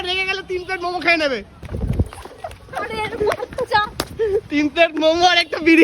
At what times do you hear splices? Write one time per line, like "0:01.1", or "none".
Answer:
0:01.6